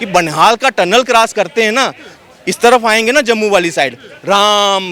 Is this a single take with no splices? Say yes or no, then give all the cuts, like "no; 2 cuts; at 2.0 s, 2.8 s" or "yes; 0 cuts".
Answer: yes; 0 cuts